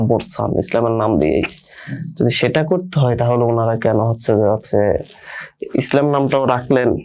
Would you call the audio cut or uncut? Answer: uncut